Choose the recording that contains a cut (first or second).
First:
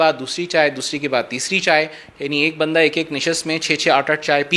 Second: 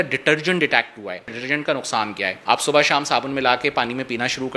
second